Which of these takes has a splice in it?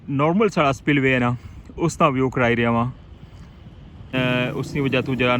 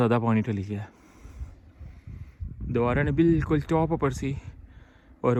first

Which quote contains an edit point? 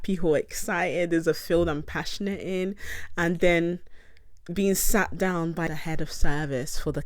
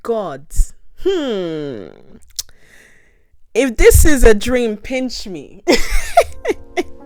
first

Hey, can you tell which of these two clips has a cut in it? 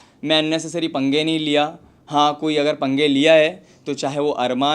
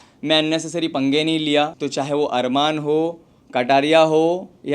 second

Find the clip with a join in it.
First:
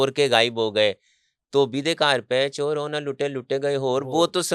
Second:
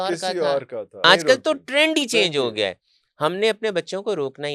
second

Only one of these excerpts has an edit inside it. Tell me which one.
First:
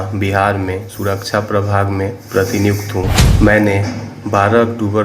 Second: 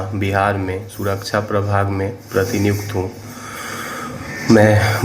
first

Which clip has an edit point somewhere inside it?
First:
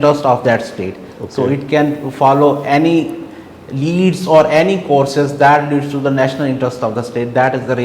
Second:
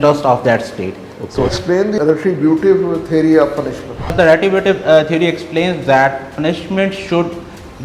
second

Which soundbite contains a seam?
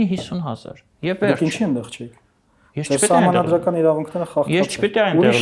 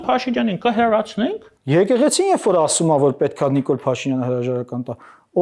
second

